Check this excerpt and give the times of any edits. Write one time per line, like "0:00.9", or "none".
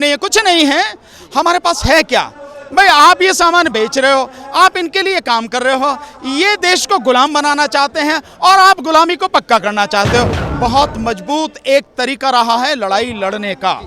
0:10.4